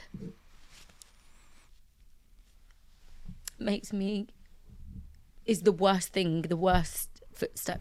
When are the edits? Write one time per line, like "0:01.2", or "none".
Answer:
none